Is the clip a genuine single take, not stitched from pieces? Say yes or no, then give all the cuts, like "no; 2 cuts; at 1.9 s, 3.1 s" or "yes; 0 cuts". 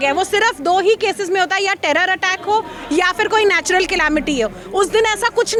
yes; 0 cuts